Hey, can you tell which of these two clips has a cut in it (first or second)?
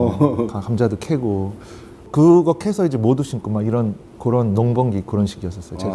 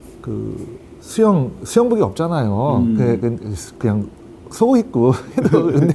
first